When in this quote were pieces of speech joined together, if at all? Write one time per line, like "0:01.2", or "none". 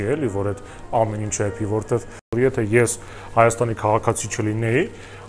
0:02.2